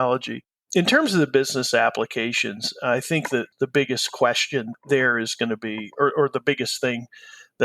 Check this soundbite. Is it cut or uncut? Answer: cut